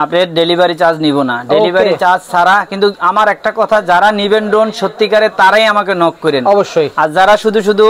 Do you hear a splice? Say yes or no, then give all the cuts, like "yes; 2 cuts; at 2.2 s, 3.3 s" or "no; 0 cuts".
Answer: no; 0 cuts